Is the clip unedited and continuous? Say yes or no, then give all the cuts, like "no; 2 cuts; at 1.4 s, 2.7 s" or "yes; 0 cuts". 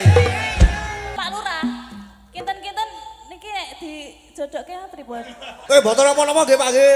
no; 2 cuts; at 1.1 s, 5.6 s